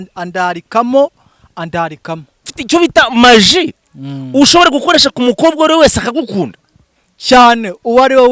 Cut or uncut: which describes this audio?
cut